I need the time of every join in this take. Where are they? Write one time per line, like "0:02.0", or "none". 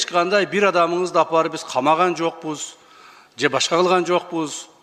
none